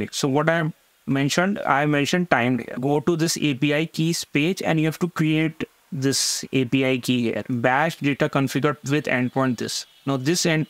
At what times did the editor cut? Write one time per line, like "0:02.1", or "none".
0:02.7
0:07.5
0:08.8